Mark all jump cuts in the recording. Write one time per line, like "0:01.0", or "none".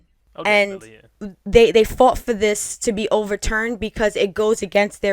0:01.1